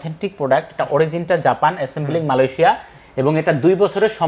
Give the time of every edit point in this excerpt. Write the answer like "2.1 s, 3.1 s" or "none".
none